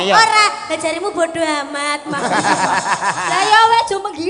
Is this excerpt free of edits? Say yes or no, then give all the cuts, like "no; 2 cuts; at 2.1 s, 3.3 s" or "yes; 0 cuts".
yes; 0 cuts